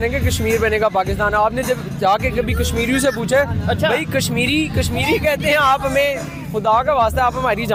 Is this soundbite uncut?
yes; 0 cuts

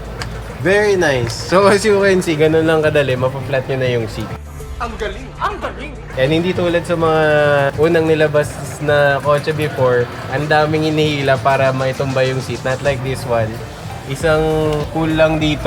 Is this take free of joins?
yes; 0 cuts

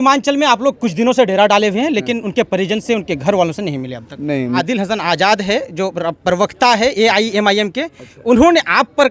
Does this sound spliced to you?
yes; 1 cut; at 4.5 s

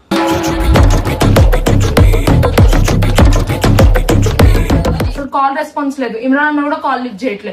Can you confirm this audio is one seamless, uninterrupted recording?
no; 1 cut; at 5.2 s

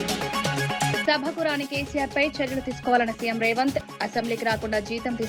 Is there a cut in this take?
yes; 1 cut; at 1.0 s

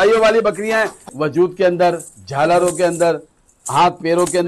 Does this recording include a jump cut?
yes; 1 cut; at 1.0 s

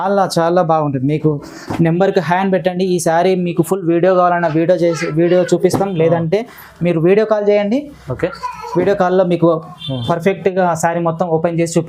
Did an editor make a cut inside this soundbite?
no; 0 cuts

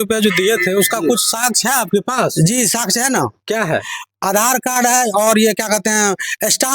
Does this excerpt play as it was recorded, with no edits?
yes; 0 cuts

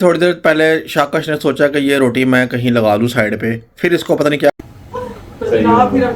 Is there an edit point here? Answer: yes; 1 cut; at 4.5 s

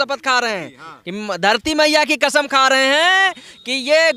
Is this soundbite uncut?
yes; 0 cuts

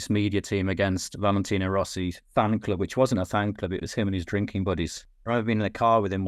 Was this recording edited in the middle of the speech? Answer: yes; 1 cut; at 5.1 s

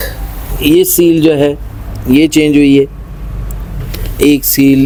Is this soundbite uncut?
yes; 0 cuts

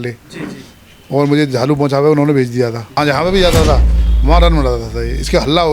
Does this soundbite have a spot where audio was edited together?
yes; 1 cut; at 2.9 s

